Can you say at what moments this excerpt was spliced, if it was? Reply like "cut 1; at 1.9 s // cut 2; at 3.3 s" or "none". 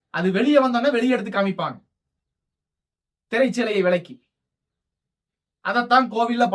none